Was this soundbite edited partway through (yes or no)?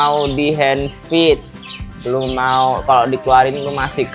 no